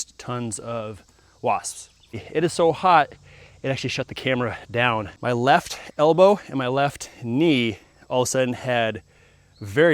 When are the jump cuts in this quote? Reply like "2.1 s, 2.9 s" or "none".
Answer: 2.2 s, 5.1 s